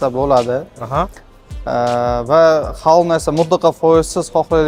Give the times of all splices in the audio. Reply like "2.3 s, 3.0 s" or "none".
none